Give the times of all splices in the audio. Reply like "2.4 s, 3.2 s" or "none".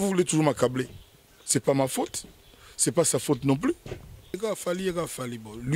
4.4 s